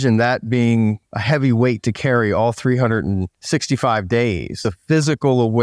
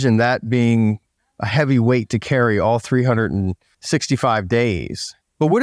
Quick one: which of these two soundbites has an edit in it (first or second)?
first